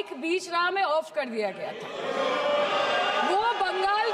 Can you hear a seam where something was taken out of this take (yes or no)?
no